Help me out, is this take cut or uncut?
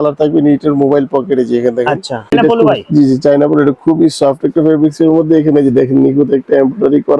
cut